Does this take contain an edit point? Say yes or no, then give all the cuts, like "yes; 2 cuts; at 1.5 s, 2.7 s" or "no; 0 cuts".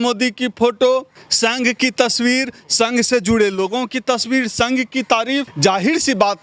yes; 2 cuts; at 1.2 s, 5.5 s